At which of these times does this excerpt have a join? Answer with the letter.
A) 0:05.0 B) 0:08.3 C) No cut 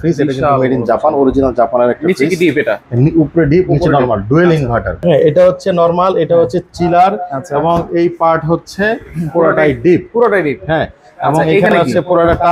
A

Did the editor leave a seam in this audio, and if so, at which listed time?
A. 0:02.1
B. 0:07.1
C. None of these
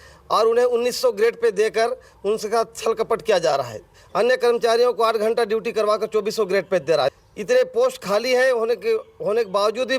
B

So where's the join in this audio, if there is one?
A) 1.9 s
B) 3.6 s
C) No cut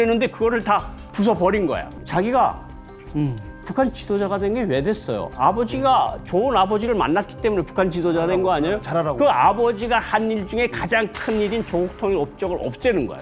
A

